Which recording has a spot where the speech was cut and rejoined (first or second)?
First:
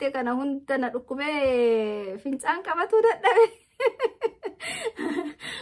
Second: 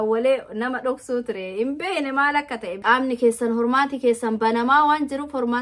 second